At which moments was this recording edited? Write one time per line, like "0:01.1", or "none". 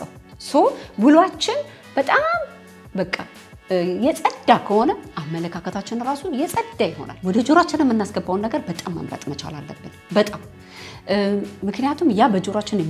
0:07.1